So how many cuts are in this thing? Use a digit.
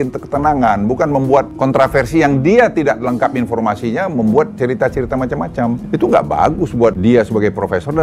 3